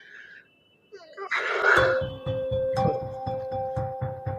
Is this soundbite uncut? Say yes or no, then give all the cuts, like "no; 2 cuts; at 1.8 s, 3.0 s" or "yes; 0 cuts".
no; 1 cut; at 1.6 s